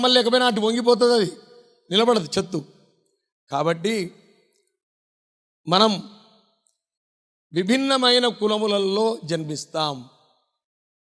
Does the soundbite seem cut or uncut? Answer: uncut